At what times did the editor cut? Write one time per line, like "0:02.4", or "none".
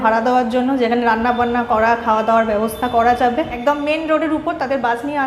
0:03.5

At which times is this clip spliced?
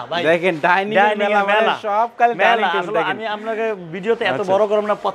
none

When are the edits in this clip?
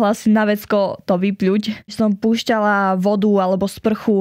0:01.9

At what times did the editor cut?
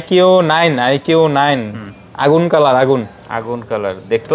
none

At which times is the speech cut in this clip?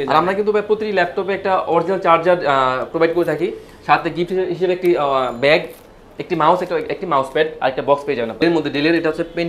0:08.4

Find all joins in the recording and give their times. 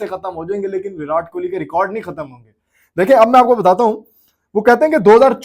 none

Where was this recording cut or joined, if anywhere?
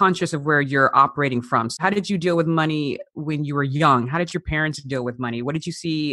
0:01.8

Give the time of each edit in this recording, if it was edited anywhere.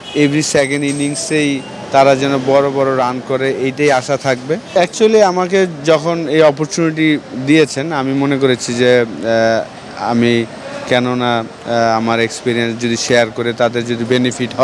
0:04.6

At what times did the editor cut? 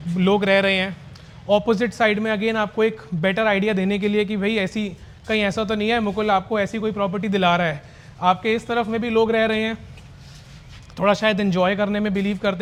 none

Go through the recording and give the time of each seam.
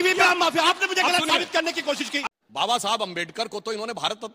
0:02.2

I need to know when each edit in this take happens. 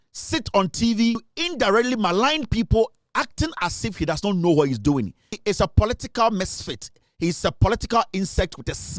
0:01.3
0:05.4

